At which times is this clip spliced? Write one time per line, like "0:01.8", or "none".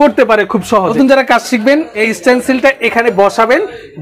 0:00.9
0:01.9